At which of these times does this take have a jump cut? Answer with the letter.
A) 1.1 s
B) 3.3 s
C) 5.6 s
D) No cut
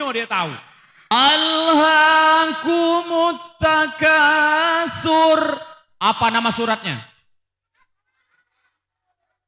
A